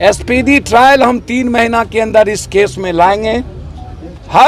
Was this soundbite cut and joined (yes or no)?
no